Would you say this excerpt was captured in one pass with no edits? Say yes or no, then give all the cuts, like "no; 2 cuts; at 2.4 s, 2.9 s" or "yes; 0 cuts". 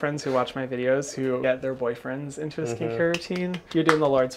no; 1 cut; at 1.4 s